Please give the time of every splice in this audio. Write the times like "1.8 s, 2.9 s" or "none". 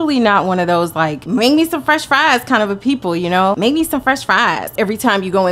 1.2 s, 3.6 s, 4.7 s